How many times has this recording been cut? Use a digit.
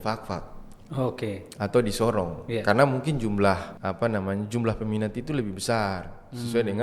1